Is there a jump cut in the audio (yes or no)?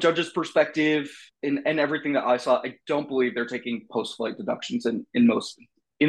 no